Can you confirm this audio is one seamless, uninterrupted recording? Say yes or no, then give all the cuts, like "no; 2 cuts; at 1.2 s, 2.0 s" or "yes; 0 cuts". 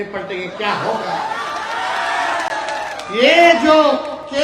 yes; 0 cuts